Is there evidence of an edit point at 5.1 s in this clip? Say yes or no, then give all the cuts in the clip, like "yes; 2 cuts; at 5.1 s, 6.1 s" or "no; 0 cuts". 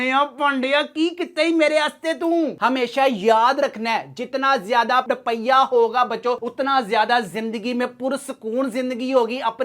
no; 1 cut; at 2.5 s